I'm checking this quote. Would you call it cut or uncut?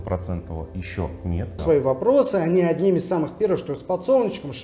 cut